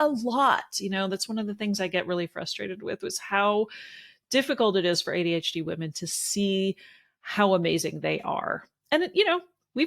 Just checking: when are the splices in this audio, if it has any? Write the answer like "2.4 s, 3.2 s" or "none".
none